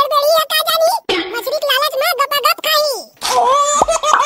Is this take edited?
yes; 1 cut; at 3.1 s

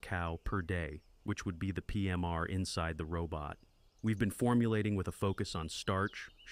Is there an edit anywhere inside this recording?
no; 0 cuts

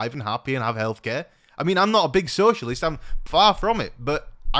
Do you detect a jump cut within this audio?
no; 0 cuts

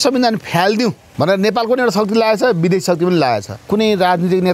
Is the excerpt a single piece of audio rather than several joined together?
no; 2 cuts; at 1.0 s, 3.6 s

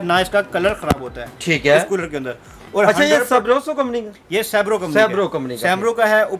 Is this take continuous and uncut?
yes; 0 cuts

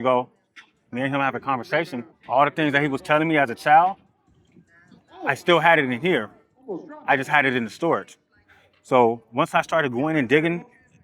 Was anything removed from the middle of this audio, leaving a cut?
yes; 1 cut; at 2.1 s

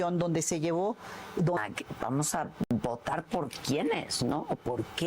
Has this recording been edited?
yes; 1 cut; at 1.6 s

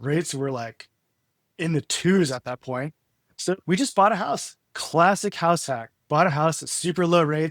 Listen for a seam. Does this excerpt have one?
no; 0 cuts

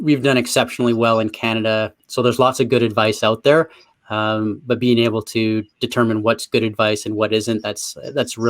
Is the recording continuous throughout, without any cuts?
no; 1 cut; at 2.0 s

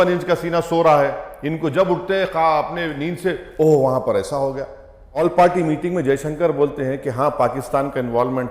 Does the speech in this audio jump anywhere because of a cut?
yes; 1 cut; at 5.0 s

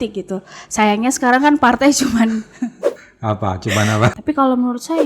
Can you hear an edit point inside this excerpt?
yes; 1 cut; at 4.1 s

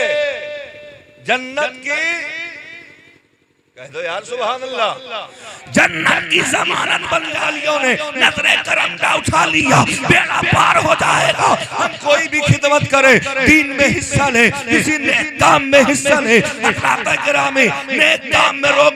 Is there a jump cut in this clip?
yes; 1 cut; at 7.4 s

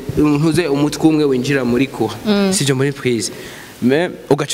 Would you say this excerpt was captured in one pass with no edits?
yes; 0 cuts

